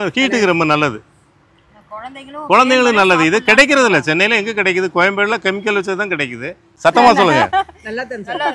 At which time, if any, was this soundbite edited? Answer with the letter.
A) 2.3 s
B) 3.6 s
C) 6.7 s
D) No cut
C